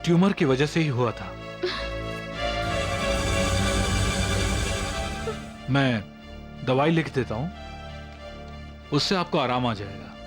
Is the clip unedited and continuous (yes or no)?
yes